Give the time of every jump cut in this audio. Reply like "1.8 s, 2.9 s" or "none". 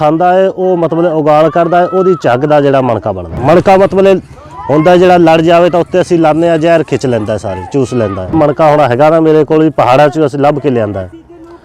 3.2 s, 8.3 s

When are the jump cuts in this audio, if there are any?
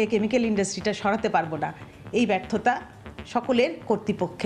none

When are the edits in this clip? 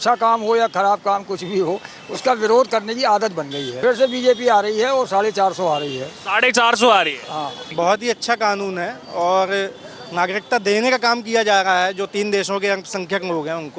3.6 s, 7.6 s

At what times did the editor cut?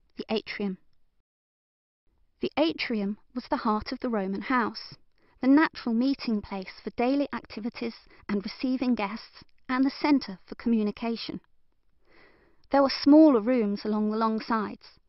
11.3 s

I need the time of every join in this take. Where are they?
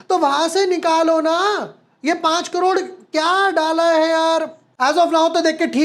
4.6 s

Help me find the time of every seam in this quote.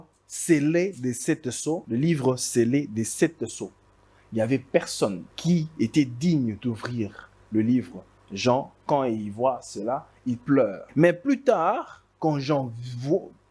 1.8 s, 5.3 s, 10.8 s

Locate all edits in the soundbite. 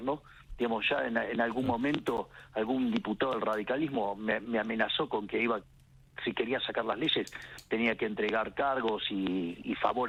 none

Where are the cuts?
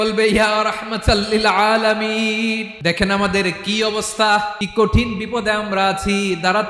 2.7 s, 4.6 s

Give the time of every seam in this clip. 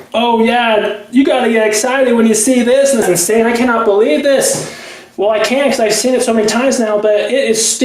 3.1 s

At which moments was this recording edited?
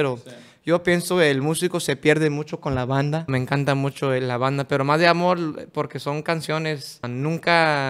3.3 s

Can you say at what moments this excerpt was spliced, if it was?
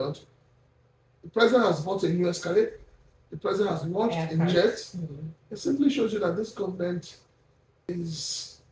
4.5 s, 7.9 s

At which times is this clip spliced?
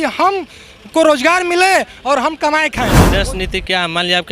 3.0 s

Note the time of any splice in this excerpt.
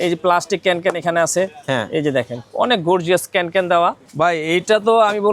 4.1 s

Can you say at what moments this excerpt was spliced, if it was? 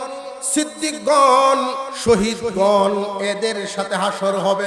1.8 s

